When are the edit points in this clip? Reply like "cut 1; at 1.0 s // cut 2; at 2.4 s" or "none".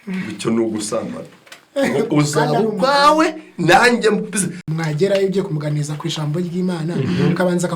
cut 1; at 4.6 s